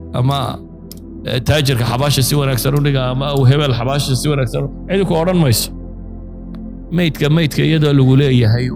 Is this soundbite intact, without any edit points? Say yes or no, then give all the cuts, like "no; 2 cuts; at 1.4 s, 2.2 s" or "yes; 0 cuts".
no; 2 cuts; at 5.6 s, 6.9 s